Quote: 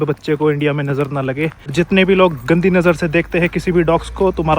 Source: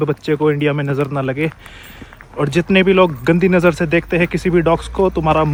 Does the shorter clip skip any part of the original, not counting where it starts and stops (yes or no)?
yes